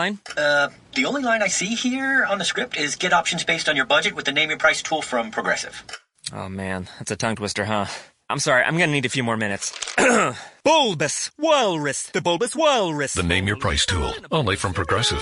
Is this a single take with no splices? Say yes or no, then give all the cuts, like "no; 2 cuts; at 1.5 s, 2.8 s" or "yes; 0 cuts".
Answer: yes; 0 cuts